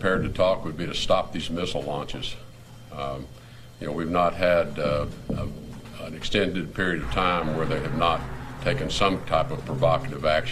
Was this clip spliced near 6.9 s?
no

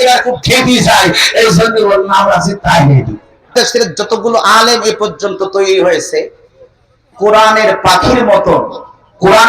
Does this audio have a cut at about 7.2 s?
no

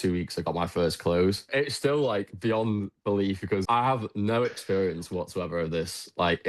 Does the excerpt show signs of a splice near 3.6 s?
yes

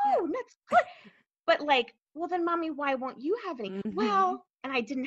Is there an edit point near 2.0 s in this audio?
yes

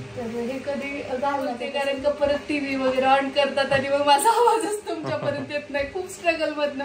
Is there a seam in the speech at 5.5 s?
no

